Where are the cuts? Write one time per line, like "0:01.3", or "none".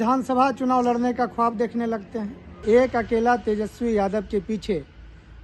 0:02.6